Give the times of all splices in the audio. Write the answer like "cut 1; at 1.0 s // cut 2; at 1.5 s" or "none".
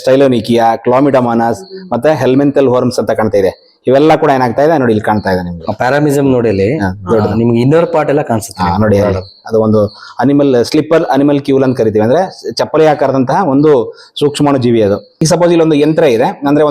cut 1; at 15.1 s